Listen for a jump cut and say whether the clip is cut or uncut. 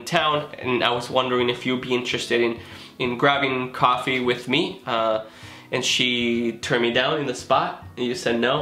uncut